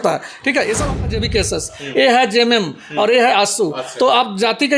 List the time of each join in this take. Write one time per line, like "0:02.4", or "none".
0:01.0